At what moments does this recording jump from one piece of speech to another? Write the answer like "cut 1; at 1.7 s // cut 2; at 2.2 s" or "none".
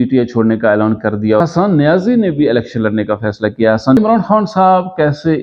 cut 1; at 1.5 s // cut 2; at 4.0 s